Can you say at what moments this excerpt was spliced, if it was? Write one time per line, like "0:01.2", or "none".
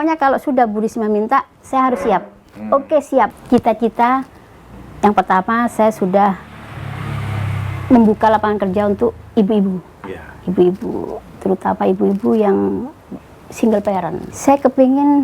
0:03.4
0:14.3